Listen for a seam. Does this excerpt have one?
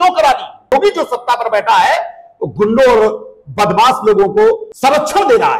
yes; 2 cuts; at 0.7 s, 4.7 s

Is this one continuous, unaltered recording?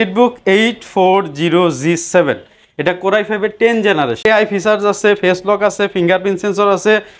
no; 1 cut; at 4.2 s

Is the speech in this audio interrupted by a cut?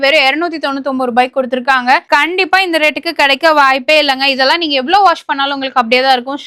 no; 0 cuts

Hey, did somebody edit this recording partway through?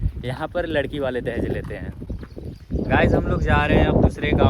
yes; 1 cut; at 2.0 s

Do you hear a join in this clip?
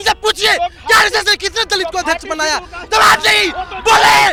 no; 0 cuts

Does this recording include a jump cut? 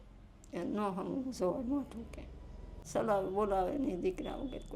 yes; 1 cut; at 2.8 s

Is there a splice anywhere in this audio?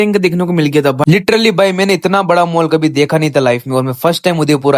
yes; 1 cut; at 1.0 s

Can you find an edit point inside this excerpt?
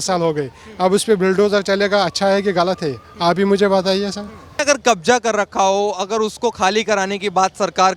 yes; 1 cut; at 4.6 s

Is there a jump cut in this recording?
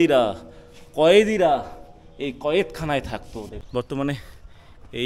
yes; 1 cut; at 3.5 s

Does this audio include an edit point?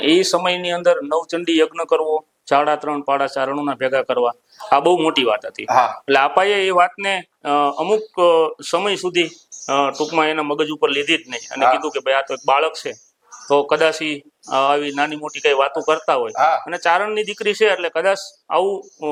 no; 0 cuts

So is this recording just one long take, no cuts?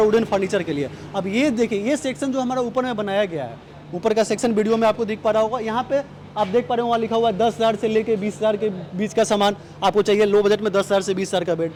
yes; 0 cuts

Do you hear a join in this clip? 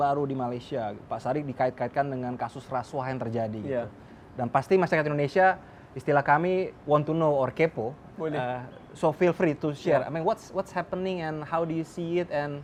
no; 0 cuts

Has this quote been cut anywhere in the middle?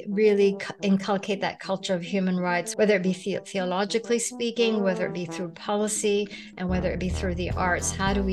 yes; 1 cut; at 2.7 s

